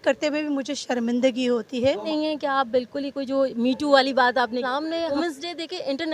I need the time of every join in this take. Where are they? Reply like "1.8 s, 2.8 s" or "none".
2.1 s, 5.2 s